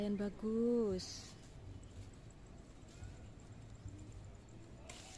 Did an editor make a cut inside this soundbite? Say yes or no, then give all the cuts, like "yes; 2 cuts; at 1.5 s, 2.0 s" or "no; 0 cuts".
no; 0 cuts